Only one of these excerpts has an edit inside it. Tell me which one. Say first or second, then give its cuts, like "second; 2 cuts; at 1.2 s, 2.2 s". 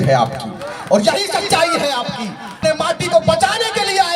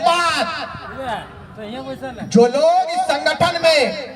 first; 1 cut; at 2.6 s